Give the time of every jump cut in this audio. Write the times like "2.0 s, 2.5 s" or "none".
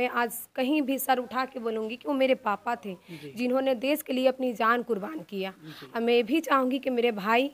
none